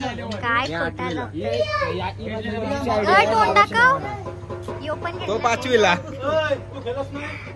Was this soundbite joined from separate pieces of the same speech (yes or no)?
no